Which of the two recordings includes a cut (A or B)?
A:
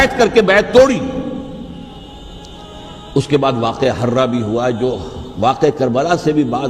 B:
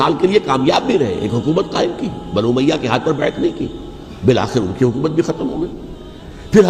A